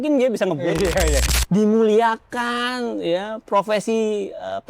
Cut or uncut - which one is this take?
cut